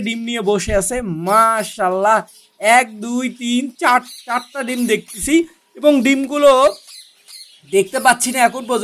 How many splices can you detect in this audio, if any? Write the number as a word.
zero